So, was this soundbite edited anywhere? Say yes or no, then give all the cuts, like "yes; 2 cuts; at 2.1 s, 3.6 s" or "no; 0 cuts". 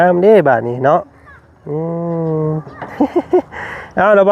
no; 0 cuts